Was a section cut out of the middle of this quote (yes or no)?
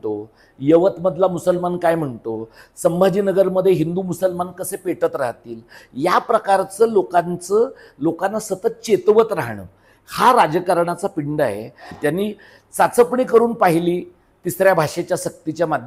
yes